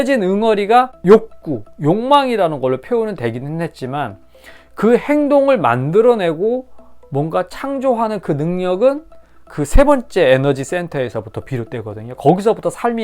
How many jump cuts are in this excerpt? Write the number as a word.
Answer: one